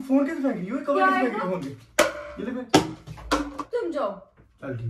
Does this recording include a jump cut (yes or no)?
yes